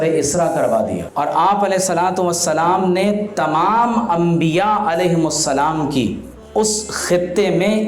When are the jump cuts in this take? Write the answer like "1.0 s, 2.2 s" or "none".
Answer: 1.0 s, 6.3 s